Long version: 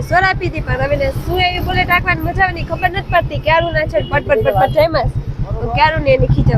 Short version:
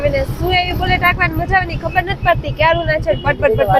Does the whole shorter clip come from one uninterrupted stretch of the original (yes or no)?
yes